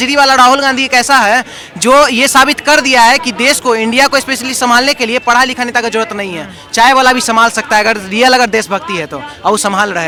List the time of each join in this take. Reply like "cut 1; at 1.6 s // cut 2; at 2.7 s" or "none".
none

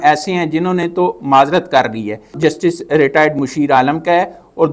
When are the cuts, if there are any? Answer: cut 1; at 2.3 s

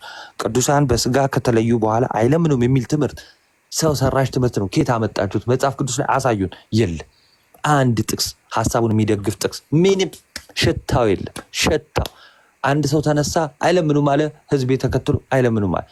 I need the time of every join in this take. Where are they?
none

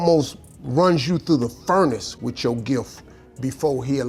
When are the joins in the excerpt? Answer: none

